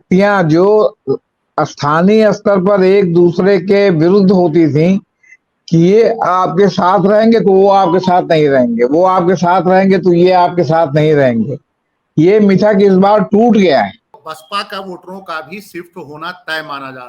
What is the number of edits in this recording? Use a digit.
1